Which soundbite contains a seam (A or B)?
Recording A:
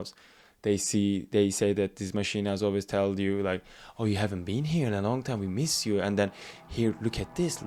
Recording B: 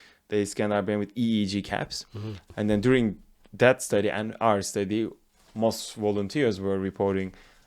B